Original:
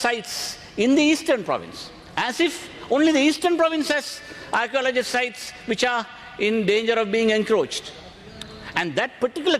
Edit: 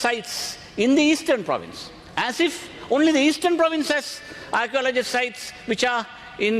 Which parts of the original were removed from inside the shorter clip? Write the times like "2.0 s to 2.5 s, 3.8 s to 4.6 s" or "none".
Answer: none